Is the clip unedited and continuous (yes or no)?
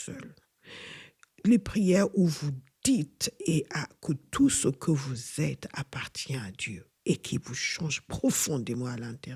yes